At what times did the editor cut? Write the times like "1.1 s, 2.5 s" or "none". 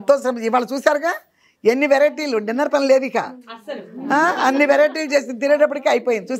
none